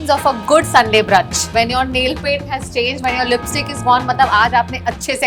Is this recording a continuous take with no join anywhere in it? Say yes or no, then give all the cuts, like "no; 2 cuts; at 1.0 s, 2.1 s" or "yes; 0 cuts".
yes; 0 cuts